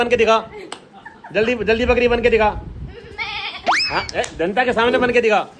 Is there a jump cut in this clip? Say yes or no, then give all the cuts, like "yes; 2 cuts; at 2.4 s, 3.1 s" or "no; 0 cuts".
no; 0 cuts